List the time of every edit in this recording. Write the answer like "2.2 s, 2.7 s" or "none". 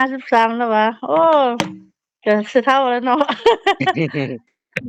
none